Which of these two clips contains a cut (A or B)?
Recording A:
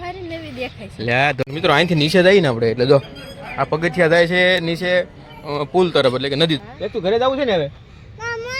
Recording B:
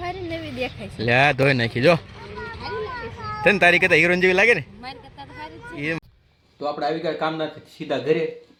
A